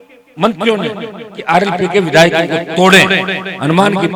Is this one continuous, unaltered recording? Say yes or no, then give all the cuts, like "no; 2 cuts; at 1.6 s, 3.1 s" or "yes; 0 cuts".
yes; 0 cuts